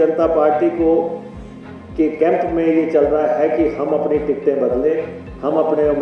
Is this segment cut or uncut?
uncut